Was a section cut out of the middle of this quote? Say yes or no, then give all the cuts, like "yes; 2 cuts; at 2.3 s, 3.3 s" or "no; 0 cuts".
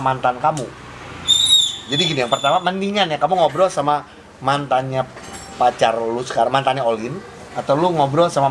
no; 0 cuts